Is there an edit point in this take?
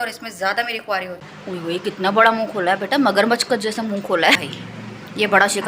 yes; 2 cuts; at 1.2 s, 4.4 s

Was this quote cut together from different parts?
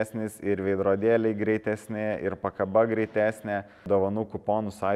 yes; 1 cut; at 3.9 s

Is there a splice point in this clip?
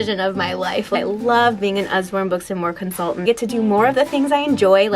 yes; 2 cuts; at 1.0 s, 3.2 s

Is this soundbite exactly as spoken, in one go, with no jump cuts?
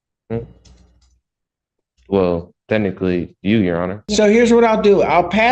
no; 1 cut; at 4.0 s

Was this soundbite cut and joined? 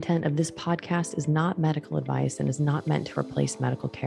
no; 0 cuts

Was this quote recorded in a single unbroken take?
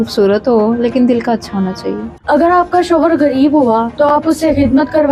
no; 1 cut; at 2.1 s

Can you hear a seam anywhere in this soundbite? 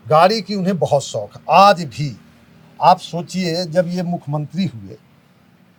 no; 0 cuts

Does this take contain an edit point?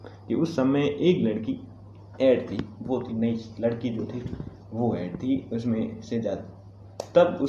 no; 0 cuts

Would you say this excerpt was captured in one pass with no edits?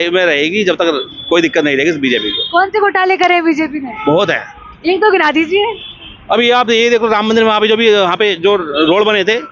yes; 0 cuts

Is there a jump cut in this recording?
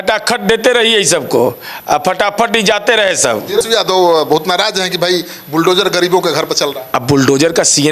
yes; 1 cut; at 3.6 s

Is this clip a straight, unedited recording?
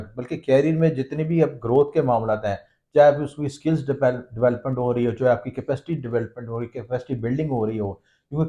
yes; 0 cuts

